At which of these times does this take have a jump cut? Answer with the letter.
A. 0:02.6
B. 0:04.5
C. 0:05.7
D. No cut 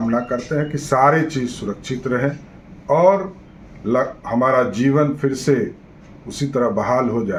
D